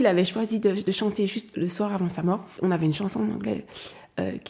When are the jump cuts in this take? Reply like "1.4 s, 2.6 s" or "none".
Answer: 1.5 s, 2.5 s